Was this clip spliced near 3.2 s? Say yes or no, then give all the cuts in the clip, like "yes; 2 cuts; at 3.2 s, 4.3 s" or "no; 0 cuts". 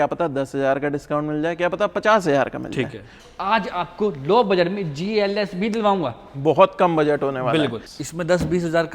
yes; 2 cuts; at 3.2 s, 7.9 s